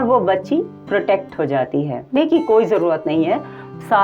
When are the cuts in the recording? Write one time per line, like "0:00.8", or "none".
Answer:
0:02.2